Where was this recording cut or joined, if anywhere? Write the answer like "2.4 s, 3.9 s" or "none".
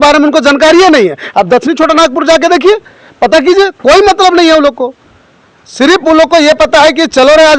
none